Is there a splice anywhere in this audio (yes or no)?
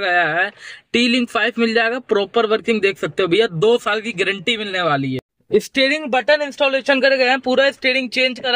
yes